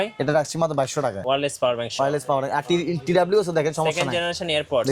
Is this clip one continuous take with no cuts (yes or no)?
no